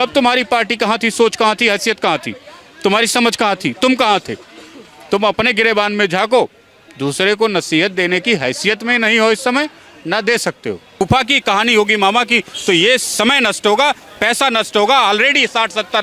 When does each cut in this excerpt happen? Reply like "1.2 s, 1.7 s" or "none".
11.0 s